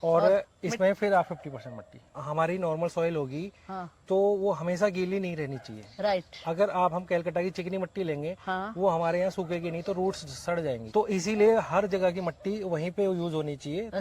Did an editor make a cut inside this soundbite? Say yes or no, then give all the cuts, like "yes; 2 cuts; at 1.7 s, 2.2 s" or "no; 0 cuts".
yes; 2 cuts; at 2.2 s, 10.8 s